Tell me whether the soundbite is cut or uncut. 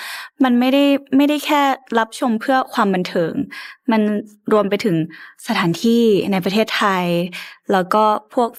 uncut